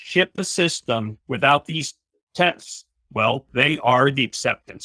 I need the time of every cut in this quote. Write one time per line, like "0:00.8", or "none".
none